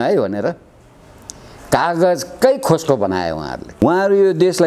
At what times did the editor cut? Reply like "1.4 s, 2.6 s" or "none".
3.6 s